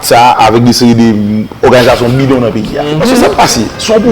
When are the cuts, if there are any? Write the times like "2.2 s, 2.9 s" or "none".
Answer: 2.9 s